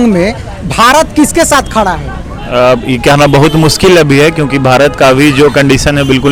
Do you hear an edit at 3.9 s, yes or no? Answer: no